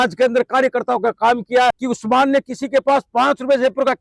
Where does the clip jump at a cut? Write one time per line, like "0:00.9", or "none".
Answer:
0:01.8